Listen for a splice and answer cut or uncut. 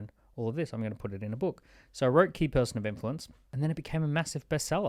cut